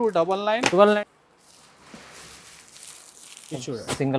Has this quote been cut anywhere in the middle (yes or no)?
yes